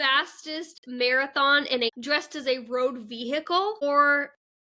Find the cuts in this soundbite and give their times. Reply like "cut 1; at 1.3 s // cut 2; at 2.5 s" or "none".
cut 1; at 1.9 s // cut 2; at 3.8 s